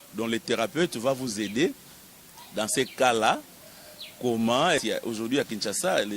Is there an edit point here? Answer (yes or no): yes